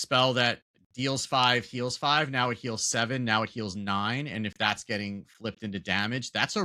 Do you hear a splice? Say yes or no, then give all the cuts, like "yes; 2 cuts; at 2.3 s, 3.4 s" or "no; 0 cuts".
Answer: no; 0 cuts